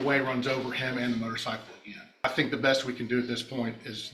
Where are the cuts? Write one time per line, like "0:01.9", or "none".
0:02.2